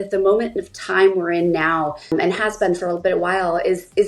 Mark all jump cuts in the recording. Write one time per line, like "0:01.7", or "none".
0:02.1